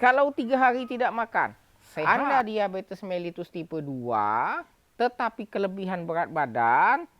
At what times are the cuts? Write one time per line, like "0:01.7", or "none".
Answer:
0:02.0

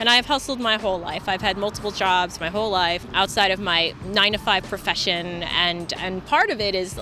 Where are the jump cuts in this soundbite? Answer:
0:03.0

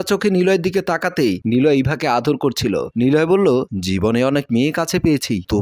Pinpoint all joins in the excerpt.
0:01.4

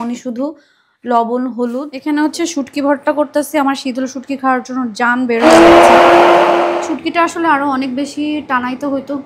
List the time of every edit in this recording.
0:01.9
0:06.6

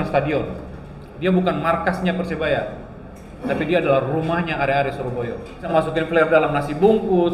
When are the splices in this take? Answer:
0:05.7

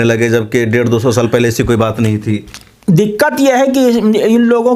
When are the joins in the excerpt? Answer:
none

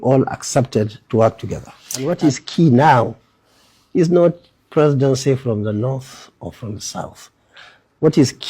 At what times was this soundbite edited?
0:02.1

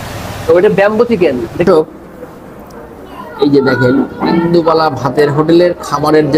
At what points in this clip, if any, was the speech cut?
0:01.6

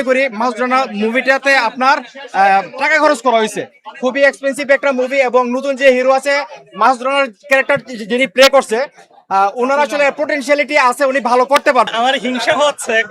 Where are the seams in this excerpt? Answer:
0:11.9

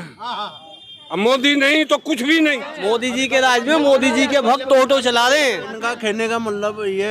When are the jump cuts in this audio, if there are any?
0:02.7
0:05.8

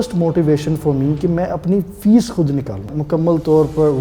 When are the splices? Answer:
0:02.9

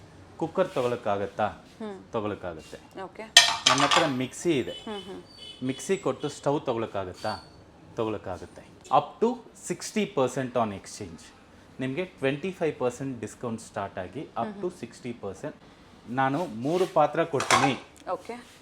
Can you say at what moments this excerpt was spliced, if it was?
0:08.7
0:15.6

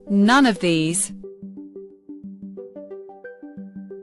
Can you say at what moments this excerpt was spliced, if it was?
0:01.0

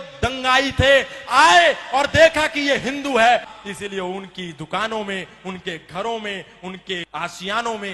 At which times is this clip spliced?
0:03.5
0:07.1

